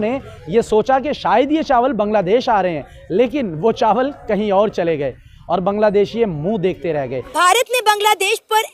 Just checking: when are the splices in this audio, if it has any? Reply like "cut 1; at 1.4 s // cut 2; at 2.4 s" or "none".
cut 1; at 7.4 s